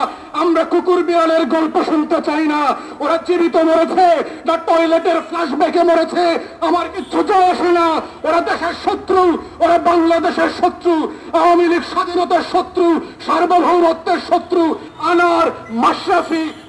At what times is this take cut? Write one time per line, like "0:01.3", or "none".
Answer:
0:14.9